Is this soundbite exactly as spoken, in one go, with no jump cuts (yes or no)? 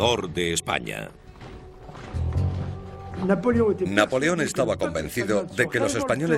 no